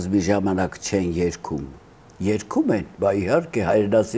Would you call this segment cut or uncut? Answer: cut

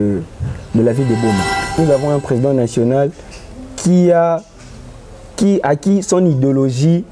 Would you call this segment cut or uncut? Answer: cut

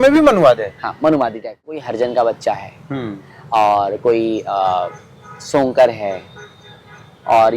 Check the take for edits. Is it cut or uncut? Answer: cut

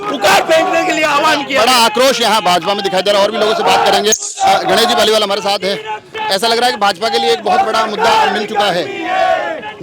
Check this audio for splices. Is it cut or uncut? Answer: uncut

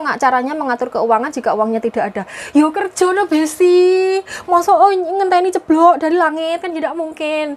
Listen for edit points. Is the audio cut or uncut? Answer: uncut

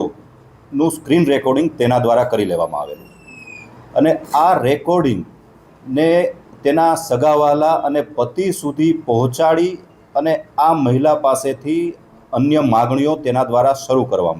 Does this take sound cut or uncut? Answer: uncut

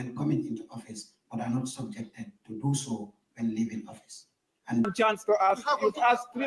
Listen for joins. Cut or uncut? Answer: cut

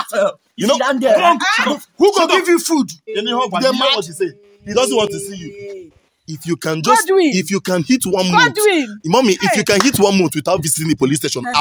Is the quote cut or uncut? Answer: uncut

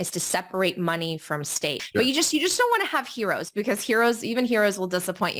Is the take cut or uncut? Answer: cut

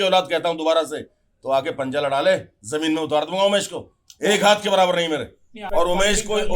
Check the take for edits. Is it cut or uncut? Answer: cut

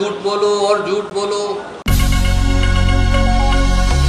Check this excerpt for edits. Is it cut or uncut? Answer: cut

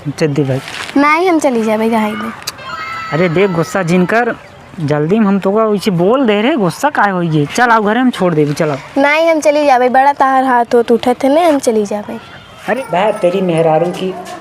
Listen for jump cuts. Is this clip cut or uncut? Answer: cut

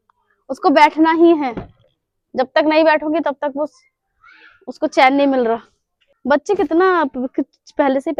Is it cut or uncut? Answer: uncut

